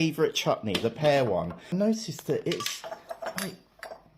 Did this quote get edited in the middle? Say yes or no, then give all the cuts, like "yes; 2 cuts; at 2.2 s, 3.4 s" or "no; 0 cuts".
yes; 1 cut; at 1.6 s